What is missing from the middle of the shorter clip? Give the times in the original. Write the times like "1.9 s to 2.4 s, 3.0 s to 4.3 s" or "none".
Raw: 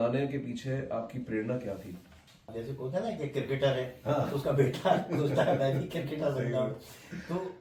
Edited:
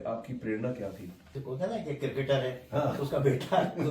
2.2 s to 2.7 s